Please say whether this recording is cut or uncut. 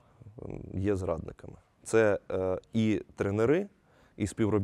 uncut